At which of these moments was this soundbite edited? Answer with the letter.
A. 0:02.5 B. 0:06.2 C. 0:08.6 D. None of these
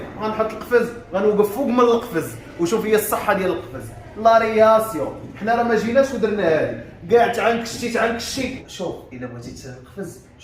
C